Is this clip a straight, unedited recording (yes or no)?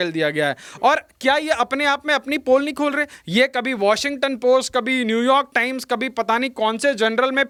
yes